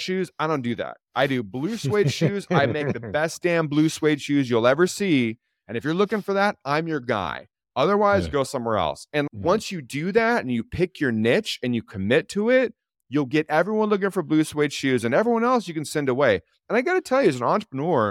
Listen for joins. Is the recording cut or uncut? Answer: uncut